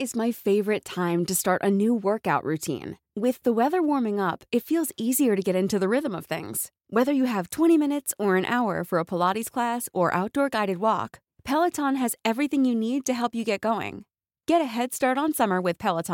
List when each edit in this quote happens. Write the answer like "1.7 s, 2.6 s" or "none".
none